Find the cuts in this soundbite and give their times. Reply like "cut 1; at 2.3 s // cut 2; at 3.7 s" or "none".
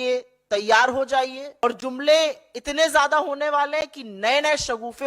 cut 1; at 1.6 s